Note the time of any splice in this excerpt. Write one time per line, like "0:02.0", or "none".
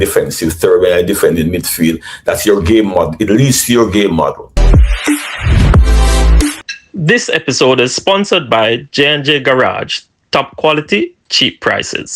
0:04.9

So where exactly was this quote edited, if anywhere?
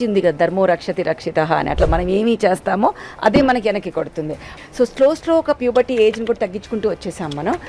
0:04.4

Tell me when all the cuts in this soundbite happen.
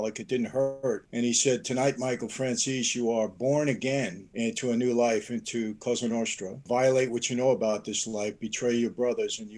0:01.1
0:04.2
0:06.6

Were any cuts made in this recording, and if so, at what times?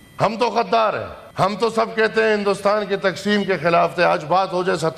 0:01.2

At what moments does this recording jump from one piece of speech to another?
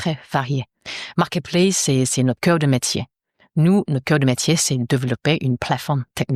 none

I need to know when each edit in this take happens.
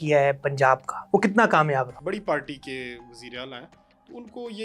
0:00.9
0:02.0

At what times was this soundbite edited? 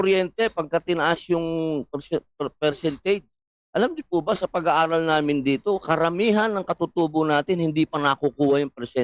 none

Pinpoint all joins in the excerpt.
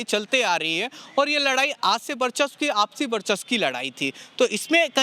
none

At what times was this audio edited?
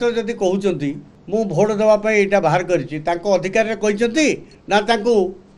0:01.1
0:04.5

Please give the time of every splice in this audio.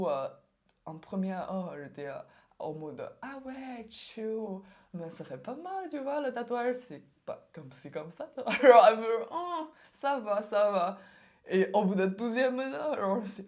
none

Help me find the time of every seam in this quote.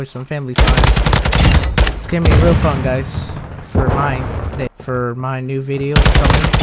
0:04.7

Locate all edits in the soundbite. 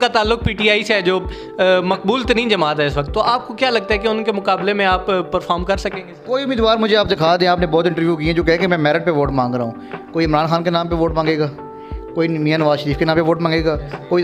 0:06.1

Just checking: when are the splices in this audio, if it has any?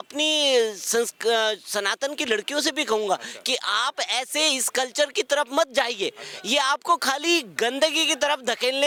none

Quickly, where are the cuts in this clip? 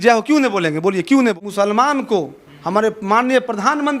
0:01.4

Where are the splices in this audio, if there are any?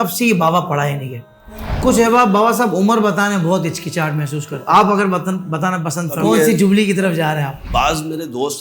0:01.8
0:04.5
0:06.2
0:07.6

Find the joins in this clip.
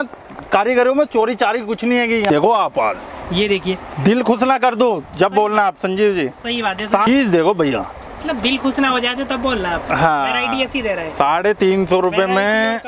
0:02.3
0:07.1

